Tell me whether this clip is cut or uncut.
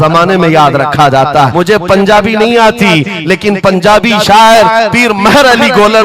cut